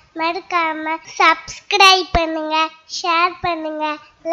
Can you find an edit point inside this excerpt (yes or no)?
yes